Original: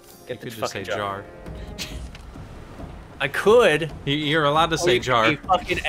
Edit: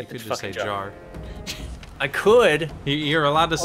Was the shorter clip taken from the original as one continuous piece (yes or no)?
no